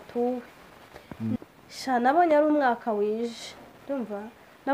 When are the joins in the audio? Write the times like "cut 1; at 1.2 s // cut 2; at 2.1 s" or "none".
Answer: cut 1; at 1.4 s